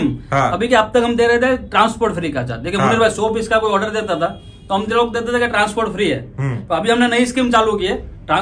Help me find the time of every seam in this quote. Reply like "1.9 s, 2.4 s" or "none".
none

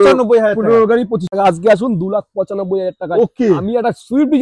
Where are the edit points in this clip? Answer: 1.3 s

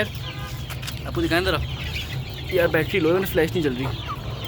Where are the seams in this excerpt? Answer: none

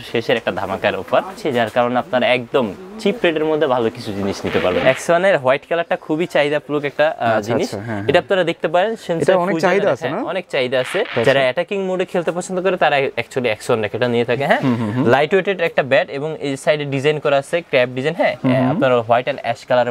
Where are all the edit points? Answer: 1.4 s, 4.8 s, 11.1 s

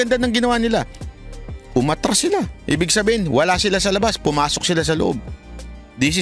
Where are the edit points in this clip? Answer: none

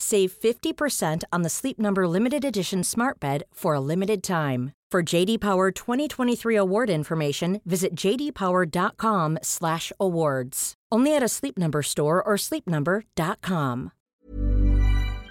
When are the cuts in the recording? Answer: 14.0 s

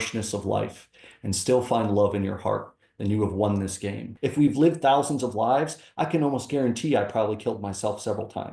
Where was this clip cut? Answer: 4.1 s

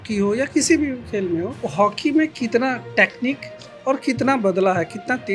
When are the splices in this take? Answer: 1.6 s

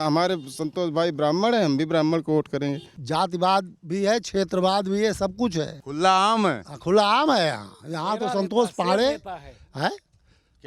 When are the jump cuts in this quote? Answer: 3.0 s

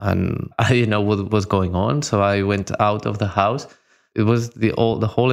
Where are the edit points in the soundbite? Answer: 1.3 s, 4.1 s

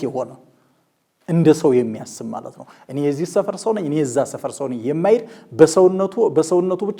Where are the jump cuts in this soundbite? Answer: none

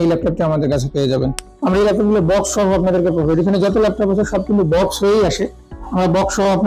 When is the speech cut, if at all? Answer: 1.4 s

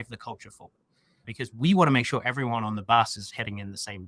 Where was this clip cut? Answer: 1.2 s

